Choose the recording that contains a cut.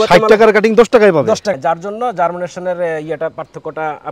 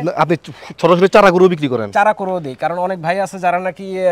first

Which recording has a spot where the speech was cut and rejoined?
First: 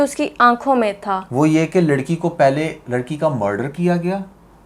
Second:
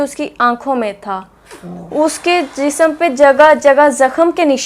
first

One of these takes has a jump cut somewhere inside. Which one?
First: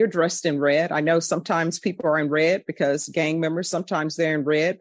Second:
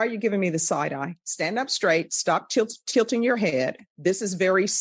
second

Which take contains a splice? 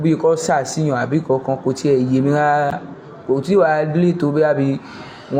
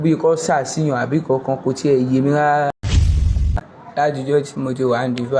second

